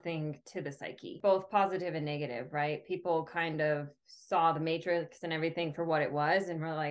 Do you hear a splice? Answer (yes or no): yes